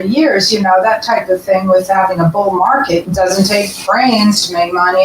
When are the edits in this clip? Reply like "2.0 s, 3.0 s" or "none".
3.1 s